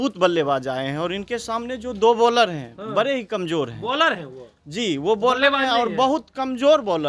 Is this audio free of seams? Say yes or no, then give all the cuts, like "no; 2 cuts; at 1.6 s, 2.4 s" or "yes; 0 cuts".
yes; 0 cuts